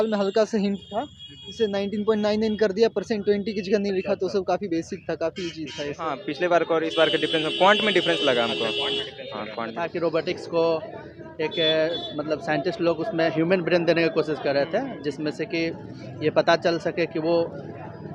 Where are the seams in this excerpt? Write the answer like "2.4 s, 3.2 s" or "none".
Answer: 6.2 s, 9.7 s